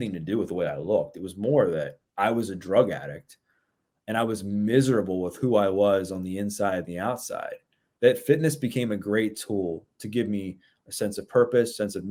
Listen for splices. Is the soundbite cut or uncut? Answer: uncut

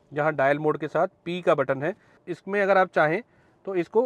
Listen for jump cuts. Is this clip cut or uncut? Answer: cut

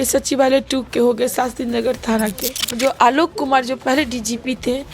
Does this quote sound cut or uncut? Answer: cut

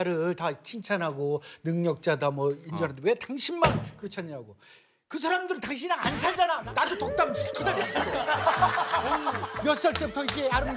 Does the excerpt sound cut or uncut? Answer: cut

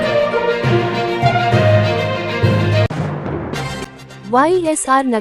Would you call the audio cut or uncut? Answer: uncut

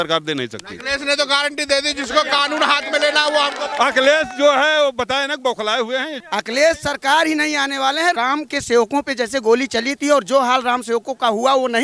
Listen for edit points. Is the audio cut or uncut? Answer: cut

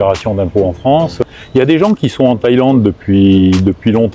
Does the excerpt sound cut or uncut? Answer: cut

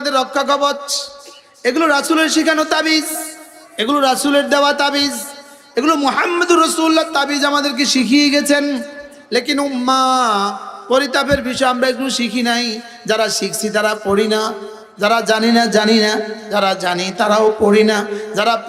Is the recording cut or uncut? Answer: uncut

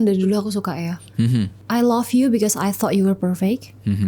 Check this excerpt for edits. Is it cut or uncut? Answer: uncut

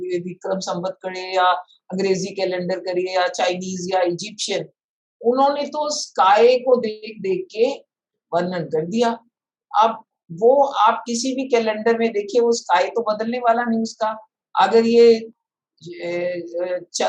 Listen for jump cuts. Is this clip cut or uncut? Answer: uncut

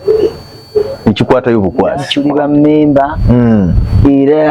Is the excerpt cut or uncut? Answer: cut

